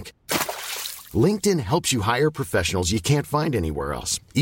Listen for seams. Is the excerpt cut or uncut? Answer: uncut